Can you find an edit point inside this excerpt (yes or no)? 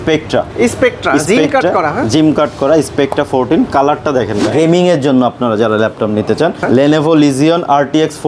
yes